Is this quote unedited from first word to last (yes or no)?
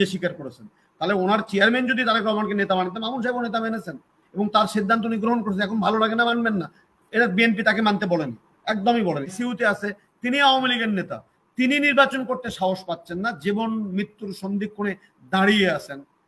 no